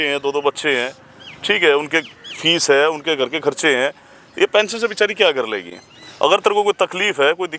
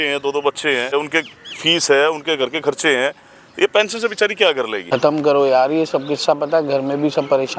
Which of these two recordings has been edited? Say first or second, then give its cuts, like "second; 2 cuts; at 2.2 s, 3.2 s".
second; 2 cuts; at 0.9 s, 4.8 s